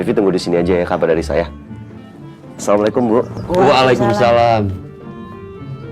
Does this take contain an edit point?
yes; 1 cut; at 4.7 s

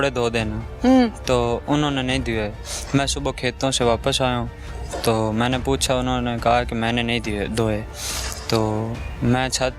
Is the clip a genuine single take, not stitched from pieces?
yes; 0 cuts

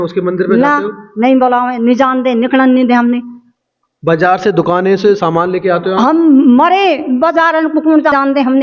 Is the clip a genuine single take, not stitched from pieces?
yes; 0 cuts

